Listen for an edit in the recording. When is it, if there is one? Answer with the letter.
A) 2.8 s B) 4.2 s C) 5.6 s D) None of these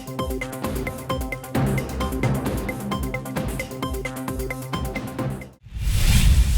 C